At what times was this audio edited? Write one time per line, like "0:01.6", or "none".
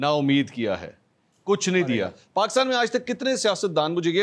0:02.2

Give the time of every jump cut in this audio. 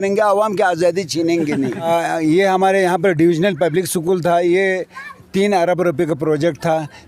0:01.9

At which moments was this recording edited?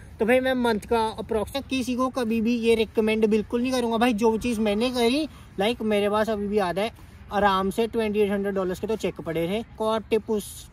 0:01.5
0:05.4
0:09.7

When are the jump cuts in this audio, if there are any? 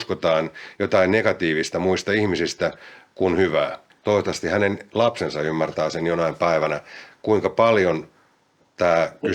0:03.9

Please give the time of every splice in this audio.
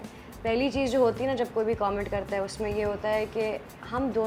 none

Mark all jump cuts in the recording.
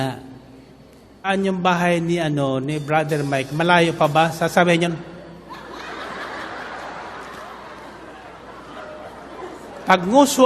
0:01.3

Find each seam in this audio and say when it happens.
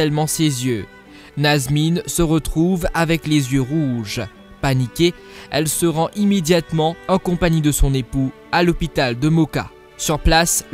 0:02.6

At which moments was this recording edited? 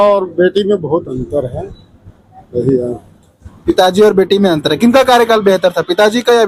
none

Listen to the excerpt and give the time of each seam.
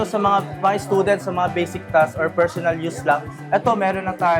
none

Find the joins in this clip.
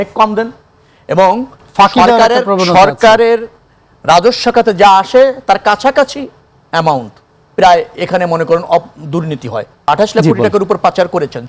0:09.9

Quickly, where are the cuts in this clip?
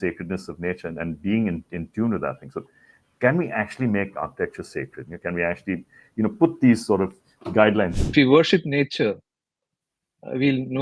0:07.9

